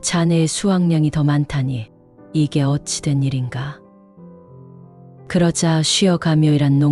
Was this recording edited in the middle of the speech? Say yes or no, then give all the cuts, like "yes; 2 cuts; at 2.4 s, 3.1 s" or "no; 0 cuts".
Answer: yes; 2 cuts; at 3.8 s, 5.2 s